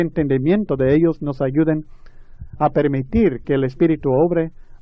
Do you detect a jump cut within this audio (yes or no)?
no